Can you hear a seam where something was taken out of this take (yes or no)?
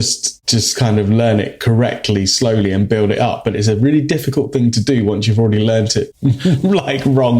yes